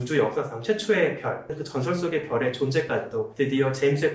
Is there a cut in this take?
yes; 1 cut; at 1.5 s

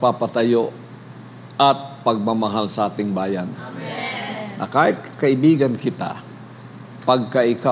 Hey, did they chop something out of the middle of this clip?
no; 0 cuts

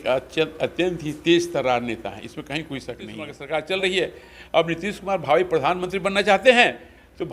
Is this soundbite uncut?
no; 1 cut; at 3.3 s

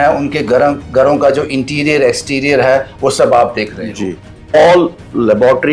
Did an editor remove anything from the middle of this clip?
yes; 1 cut; at 4.5 s

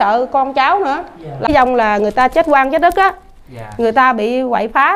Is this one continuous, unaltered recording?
no; 1 cut; at 1.5 s

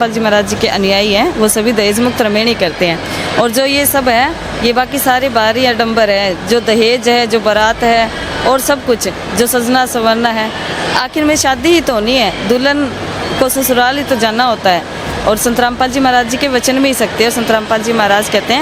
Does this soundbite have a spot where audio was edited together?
no; 0 cuts

